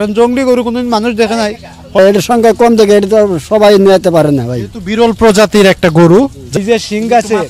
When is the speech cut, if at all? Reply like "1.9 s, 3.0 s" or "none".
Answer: 2.0 s, 6.4 s